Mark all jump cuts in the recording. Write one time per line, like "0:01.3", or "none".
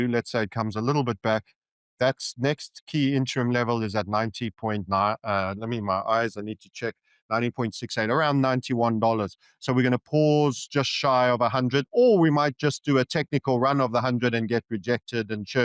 none

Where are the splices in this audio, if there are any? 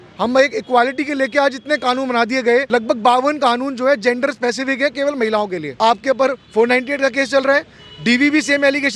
0:02.7
0:05.7

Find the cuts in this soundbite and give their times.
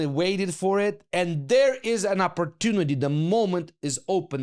none

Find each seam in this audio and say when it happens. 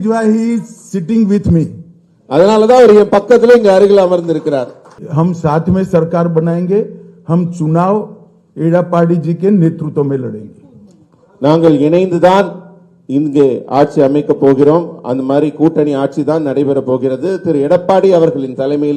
0:05.0

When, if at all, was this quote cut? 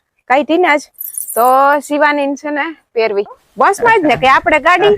0:03.4

